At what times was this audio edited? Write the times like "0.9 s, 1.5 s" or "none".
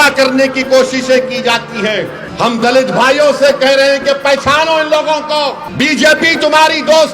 2.2 s, 5.6 s